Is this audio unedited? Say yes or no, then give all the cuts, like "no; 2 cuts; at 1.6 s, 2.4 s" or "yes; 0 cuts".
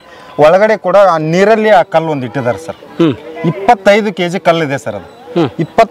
yes; 0 cuts